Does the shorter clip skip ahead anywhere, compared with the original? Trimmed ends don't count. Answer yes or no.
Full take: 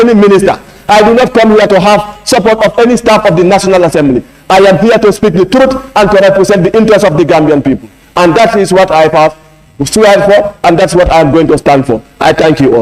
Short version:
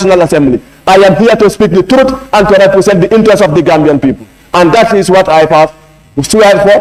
no